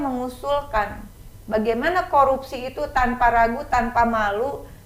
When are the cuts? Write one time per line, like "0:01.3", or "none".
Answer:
none

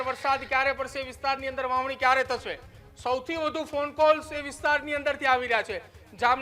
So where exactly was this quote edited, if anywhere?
none

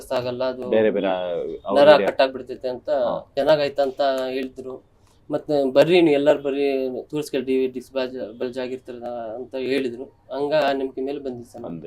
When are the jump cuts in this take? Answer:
0:03.3

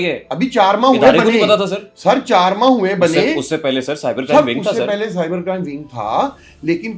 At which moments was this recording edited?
none

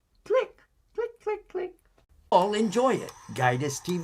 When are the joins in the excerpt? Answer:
0:02.3

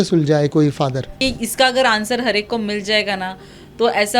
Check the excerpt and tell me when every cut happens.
0:01.2

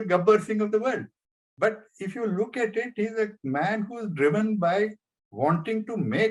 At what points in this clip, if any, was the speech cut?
none

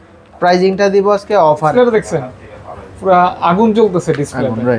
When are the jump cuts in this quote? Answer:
0:01.7

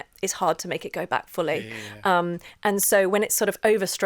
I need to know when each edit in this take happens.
none

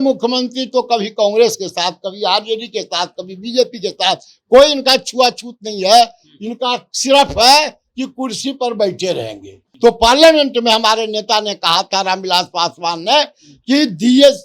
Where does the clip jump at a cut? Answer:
0:09.6

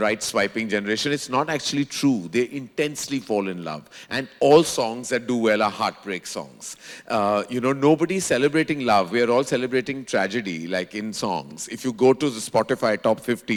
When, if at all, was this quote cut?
none

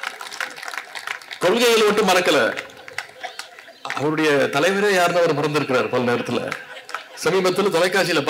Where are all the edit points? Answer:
none

